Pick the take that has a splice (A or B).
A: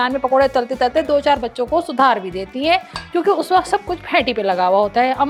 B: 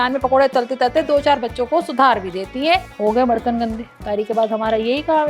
B